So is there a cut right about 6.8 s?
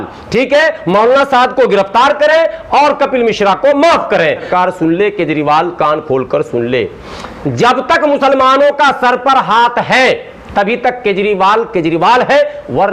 no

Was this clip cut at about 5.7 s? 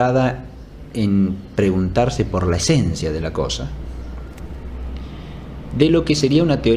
no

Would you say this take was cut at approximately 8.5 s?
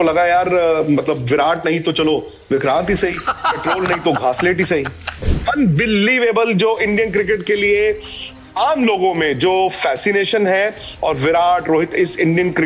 no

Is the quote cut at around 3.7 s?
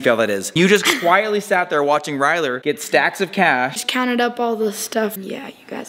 yes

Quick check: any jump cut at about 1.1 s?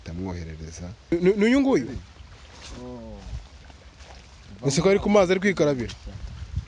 yes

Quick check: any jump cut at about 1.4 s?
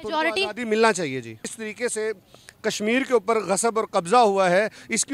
yes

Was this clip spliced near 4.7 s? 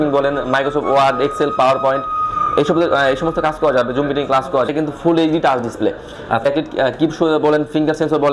yes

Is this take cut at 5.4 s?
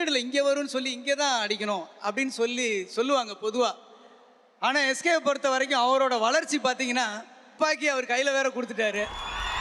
no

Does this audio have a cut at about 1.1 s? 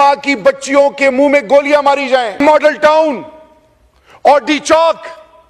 no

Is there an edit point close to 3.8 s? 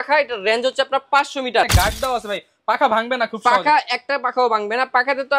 no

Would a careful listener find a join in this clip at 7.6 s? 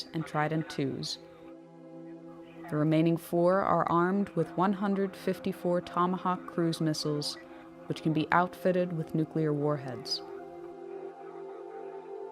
no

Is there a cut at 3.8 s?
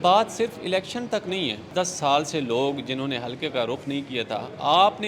no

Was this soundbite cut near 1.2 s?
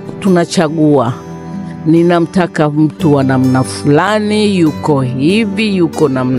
no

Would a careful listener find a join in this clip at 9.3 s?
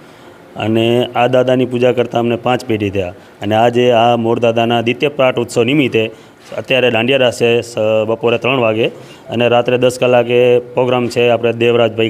no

